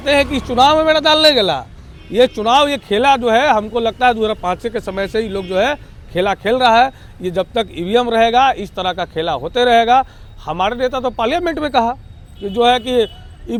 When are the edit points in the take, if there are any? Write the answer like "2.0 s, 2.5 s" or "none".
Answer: none